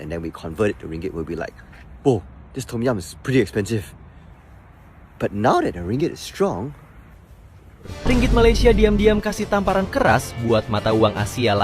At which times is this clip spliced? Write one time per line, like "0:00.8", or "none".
0:07.9

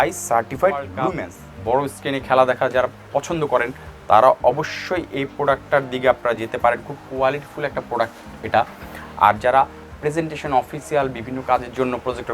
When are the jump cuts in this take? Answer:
0:01.6

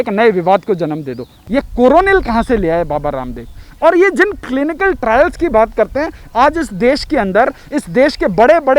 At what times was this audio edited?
0:01.4

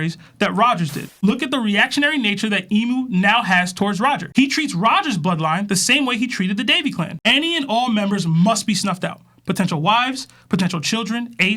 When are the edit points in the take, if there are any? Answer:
0:01.1

